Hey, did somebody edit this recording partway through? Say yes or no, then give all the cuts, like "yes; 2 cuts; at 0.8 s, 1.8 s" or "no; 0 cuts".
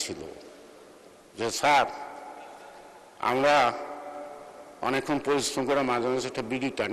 no; 0 cuts